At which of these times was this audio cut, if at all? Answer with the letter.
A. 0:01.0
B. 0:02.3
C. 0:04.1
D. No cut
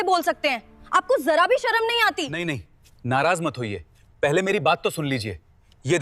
B